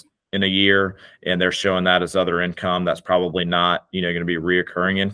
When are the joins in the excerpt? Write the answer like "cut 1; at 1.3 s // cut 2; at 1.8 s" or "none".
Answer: none